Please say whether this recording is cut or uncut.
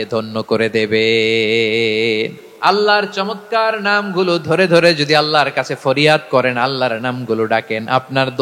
cut